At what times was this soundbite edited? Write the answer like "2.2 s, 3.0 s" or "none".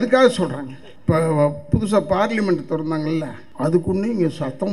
0.9 s, 3.4 s

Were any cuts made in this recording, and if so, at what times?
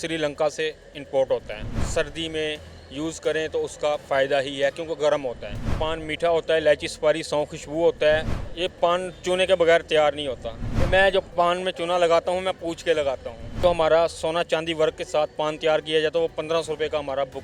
1.8 s, 5.8 s, 8.4 s, 10.7 s, 13.6 s

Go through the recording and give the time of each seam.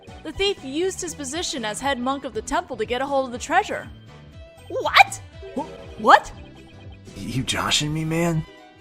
3.7 s

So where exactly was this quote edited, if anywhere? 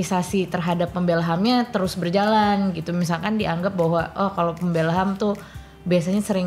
none

